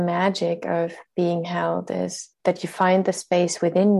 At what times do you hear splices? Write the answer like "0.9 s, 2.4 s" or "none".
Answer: 2.3 s